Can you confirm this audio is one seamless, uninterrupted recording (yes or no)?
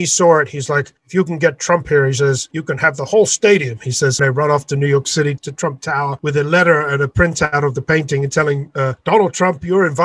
no